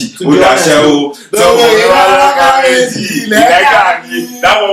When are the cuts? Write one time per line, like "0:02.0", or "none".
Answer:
none